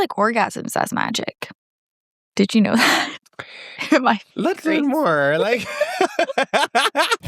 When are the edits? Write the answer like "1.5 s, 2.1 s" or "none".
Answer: none